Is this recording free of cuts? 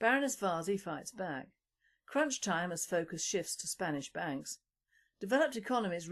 yes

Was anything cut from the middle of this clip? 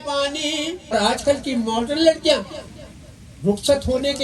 yes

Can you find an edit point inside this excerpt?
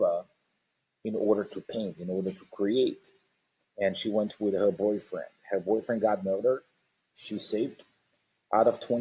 no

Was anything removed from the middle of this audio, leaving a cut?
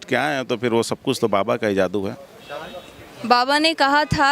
no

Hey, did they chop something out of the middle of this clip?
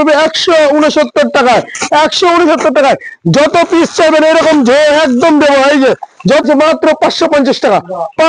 yes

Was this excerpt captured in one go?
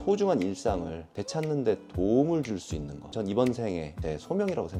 yes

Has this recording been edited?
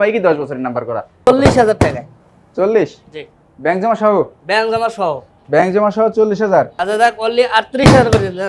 yes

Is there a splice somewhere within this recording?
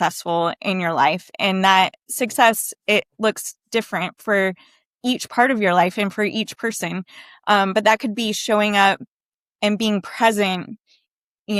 no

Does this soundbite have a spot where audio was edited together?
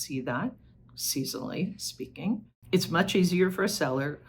yes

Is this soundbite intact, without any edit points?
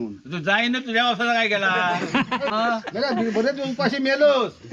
no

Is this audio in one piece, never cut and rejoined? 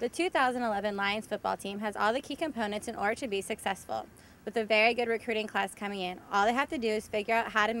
yes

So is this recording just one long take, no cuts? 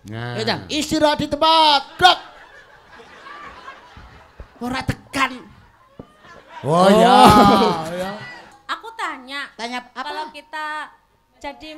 no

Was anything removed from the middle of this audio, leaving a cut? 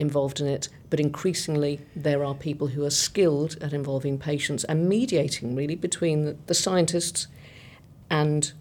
no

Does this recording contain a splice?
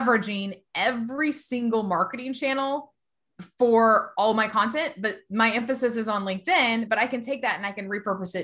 no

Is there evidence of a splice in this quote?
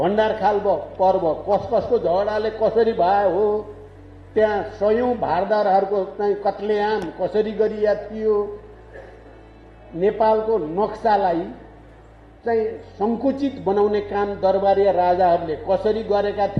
no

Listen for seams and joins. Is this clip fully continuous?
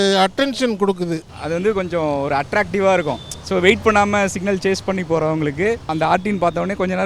no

